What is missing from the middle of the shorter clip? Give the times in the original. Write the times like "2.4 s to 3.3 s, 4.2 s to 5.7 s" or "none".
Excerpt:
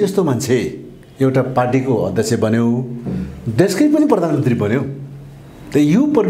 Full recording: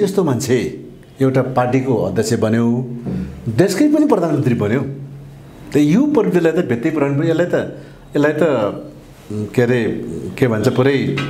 none